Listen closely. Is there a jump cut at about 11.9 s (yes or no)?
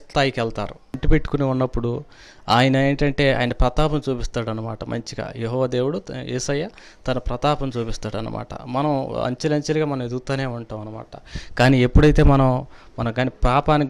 no